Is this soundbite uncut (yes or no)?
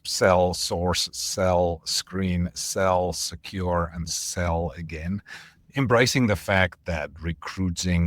no